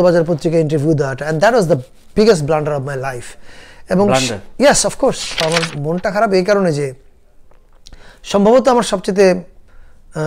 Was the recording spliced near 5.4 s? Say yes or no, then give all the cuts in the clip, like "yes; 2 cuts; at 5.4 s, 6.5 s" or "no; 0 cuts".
yes; 1 cut; at 5.4 s